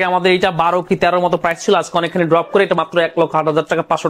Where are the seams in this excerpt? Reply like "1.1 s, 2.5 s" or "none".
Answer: none